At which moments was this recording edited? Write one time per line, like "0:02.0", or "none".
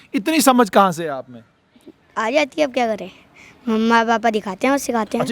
none